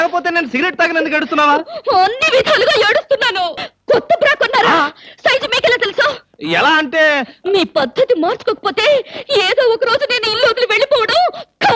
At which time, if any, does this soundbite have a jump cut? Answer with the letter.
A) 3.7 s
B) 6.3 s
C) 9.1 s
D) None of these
A